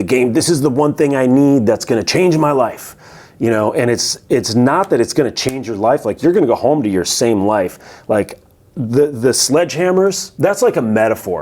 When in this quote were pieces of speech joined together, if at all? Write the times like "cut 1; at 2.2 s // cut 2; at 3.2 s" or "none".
cut 1; at 10.3 s